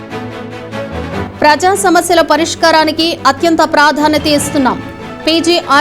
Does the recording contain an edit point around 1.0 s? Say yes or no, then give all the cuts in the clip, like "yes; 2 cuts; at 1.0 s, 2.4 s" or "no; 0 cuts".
yes; 1 cut; at 1.0 s